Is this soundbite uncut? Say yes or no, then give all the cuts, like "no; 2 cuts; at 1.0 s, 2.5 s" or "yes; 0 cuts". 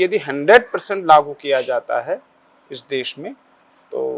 yes; 0 cuts